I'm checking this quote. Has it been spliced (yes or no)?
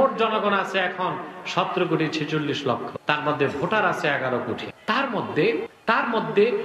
yes